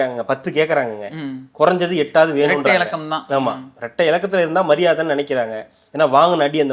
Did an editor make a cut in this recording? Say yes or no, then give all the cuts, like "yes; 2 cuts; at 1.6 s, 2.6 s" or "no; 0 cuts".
no; 0 cuts